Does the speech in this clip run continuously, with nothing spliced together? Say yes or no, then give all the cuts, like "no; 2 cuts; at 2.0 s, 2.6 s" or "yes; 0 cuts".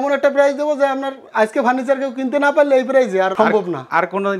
yes; 0 cuts